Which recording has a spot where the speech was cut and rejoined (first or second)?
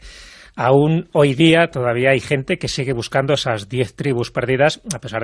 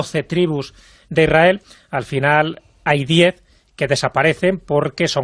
first